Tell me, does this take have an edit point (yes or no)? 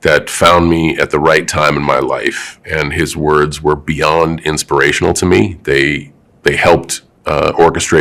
no